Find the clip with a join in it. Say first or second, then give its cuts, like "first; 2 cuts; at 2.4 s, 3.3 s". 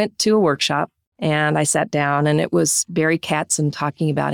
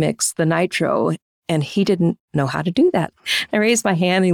second; 1 cut; at 3.2 s